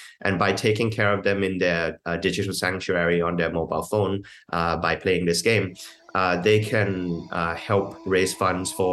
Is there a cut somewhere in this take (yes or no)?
yes